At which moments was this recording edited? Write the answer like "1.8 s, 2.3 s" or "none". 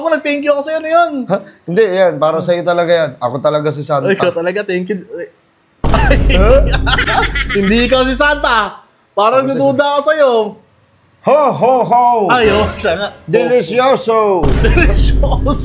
none

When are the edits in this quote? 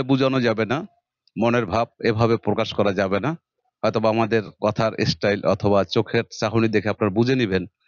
none

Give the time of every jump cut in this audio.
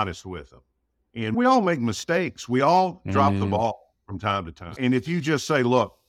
1.3 s, 4.8 s

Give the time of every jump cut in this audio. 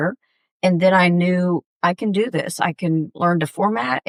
none

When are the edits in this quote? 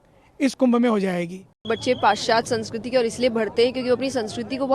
1.6 s

